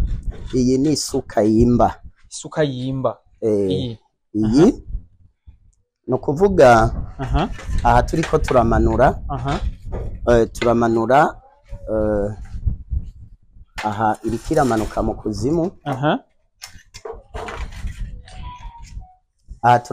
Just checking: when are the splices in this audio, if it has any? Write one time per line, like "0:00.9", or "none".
none